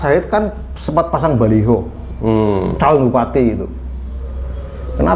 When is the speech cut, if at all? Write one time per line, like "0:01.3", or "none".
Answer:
none